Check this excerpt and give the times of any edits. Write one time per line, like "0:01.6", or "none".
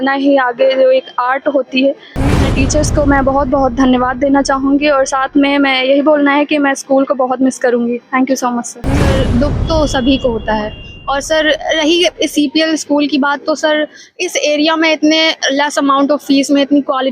0:02.5
0:09.2